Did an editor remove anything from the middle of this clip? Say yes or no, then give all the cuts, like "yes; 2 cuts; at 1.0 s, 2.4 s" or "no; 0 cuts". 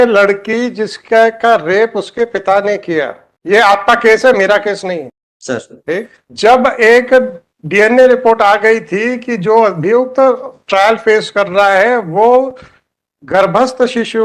no; 0 cuts